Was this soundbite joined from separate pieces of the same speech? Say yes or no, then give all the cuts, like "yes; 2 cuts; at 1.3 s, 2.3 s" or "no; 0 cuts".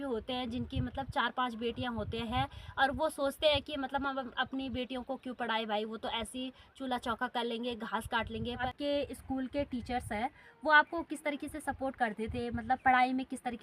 yes; 1 cut; at 8.7 s